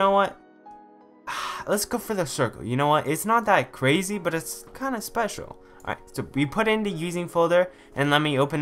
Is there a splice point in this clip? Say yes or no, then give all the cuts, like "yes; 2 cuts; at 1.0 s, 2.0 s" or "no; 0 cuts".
no; 0 cuts